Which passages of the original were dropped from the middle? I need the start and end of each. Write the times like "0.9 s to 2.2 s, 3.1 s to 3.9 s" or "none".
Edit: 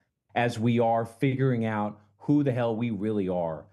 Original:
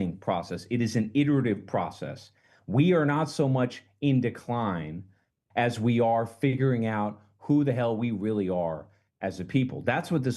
none